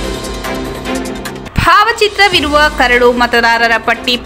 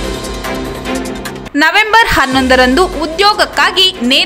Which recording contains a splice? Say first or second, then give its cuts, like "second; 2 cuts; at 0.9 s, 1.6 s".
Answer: first; 1 cut; at 0.9 s